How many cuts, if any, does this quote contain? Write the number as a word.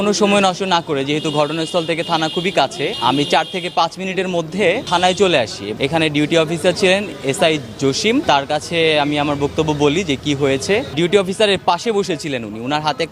five